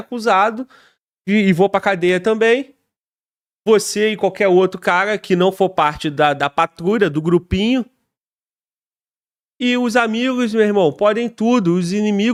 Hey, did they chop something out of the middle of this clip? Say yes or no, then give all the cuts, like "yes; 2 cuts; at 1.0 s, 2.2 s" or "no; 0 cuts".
no; 0 cuts